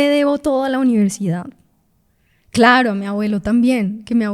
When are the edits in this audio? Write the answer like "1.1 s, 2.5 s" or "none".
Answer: none